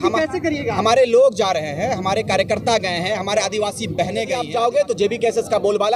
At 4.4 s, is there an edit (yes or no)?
yes